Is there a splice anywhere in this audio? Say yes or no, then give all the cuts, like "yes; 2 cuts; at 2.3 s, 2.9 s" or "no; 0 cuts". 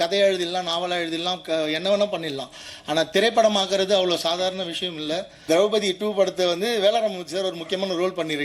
yes; 1 cut; at 5.3 s